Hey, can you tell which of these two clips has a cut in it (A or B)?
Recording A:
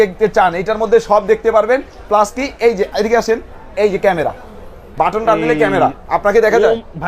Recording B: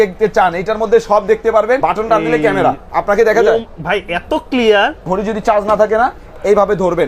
B